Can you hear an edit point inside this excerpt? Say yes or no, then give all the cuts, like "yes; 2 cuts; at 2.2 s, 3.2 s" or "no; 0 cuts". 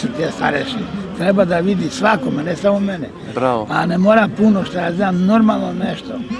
no; 0 cuts